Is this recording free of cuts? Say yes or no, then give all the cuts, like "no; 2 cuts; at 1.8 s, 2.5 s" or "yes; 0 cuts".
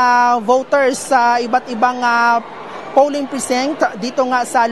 yes; 0 cuts